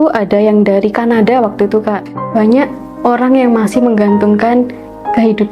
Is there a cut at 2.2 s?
yes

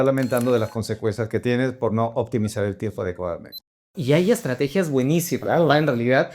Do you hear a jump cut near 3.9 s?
yes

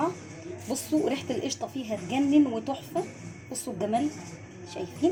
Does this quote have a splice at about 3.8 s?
no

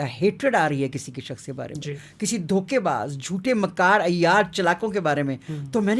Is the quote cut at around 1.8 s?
no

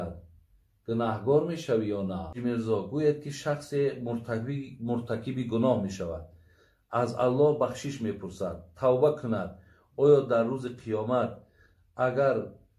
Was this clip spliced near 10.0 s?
no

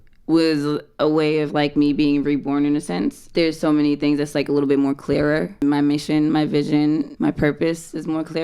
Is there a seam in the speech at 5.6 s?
yes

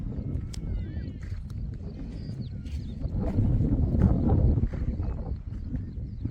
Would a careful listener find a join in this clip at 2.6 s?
no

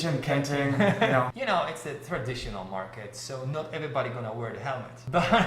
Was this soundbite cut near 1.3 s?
yes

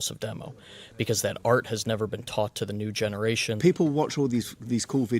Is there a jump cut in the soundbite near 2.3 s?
no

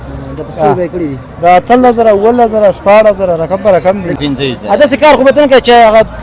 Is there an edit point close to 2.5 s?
no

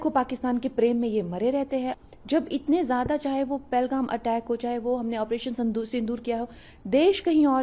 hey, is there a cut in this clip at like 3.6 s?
no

